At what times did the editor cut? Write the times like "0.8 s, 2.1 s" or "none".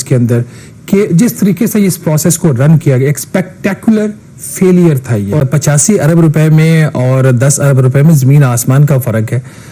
5.4 s